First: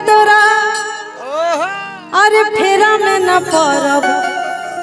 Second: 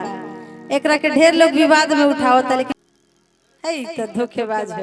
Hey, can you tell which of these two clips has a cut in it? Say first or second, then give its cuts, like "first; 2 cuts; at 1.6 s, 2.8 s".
second; 1 cut; at 2.7 s